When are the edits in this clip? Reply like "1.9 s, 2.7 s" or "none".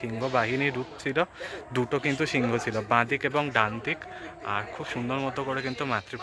none